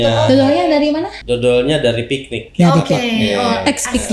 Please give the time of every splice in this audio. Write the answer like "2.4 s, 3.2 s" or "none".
1.1 s